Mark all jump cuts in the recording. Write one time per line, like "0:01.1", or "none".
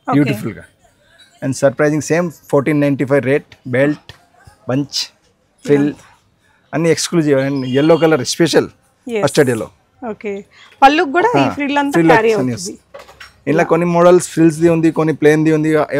none